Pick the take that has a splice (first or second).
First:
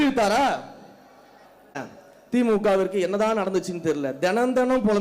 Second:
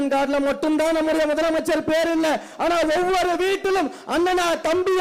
first